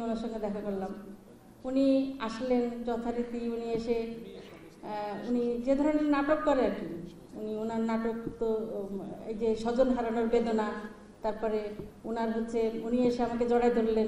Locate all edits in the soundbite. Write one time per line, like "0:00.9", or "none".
none